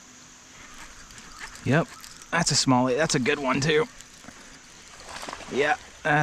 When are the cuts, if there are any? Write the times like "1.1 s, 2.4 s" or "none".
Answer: none